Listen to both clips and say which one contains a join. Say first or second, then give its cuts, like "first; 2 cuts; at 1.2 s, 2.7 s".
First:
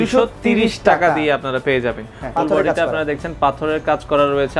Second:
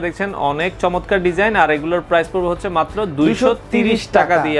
first; 1 cut; at 2.3 s